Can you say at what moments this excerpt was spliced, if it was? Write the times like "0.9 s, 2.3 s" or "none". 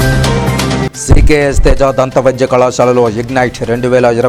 none